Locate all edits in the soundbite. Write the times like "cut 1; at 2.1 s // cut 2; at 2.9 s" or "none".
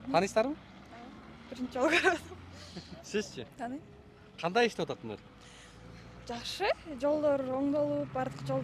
none